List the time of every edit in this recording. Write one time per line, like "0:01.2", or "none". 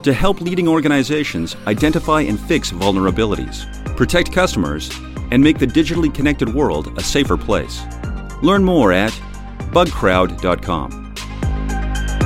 0:11.1

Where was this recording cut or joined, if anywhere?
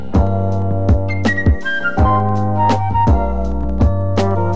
none

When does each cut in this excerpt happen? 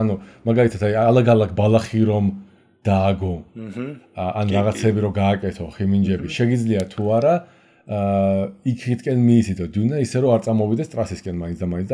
none

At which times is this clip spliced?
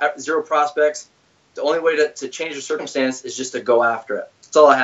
0:02.9

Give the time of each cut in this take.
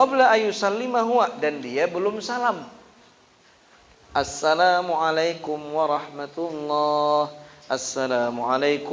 none

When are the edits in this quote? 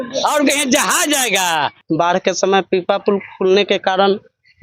0:01.8

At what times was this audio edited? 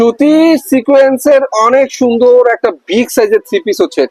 none

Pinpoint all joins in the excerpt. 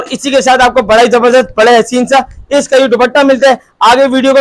none

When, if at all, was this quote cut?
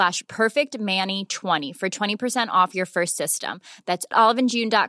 0:01.7

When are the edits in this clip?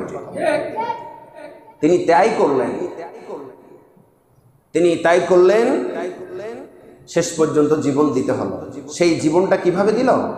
none

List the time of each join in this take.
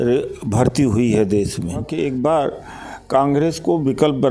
0:01.9

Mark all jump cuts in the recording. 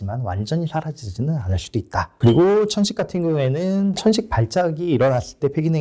0:02.1

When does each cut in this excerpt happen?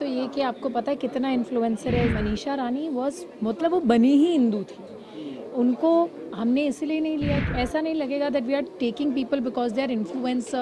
0:02.1
0:07.5

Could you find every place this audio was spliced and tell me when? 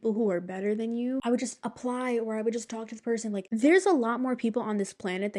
0:01.2
0:03.4

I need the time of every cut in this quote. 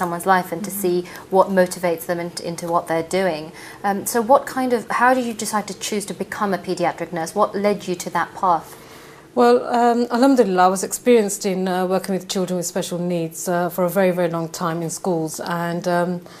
0:14.1

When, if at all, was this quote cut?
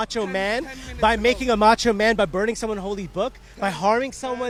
none

